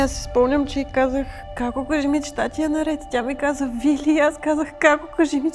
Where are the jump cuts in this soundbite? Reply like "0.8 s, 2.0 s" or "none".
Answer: 1.4 s